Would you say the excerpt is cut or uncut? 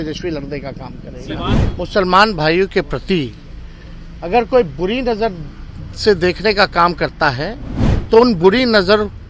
cut